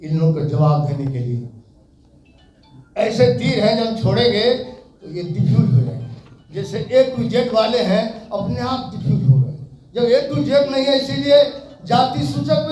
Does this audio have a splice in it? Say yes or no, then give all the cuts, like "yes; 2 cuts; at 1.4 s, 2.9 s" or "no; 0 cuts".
no; 0 cuts